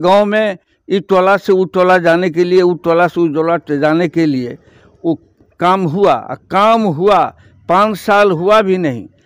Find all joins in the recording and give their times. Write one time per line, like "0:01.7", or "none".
none